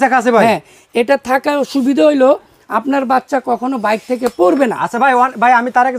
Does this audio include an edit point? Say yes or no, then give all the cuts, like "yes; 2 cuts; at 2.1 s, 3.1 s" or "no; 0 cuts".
no; 0 cuts